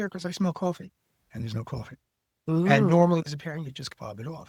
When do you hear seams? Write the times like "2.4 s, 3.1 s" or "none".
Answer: none